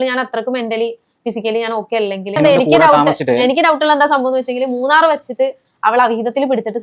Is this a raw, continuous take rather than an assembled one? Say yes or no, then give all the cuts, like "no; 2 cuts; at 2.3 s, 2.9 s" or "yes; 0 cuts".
no; 1 cut; at 2.4 s